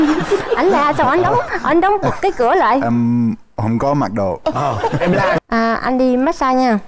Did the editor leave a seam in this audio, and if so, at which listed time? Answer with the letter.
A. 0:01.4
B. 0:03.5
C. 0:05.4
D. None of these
C